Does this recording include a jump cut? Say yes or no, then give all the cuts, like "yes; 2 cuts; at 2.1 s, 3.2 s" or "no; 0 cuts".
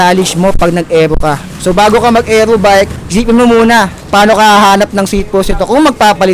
yes; 3 cuts; at 1.5 s, 3.0 s, 4.0 s